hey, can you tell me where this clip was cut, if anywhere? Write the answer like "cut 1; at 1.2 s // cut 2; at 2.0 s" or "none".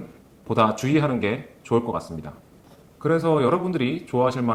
none